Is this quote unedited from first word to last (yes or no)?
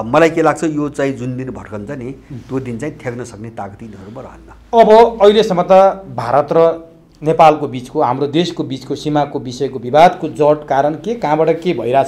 yes